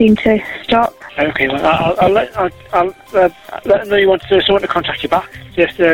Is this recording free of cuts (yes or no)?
no